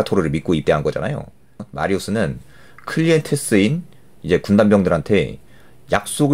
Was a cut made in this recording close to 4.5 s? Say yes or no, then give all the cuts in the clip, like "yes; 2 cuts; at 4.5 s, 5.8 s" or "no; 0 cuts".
no; 1 cut; at 1.7 s